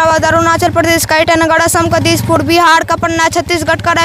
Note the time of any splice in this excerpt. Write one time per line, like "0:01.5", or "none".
none